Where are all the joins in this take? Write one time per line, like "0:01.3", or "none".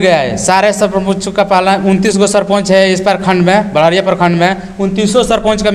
none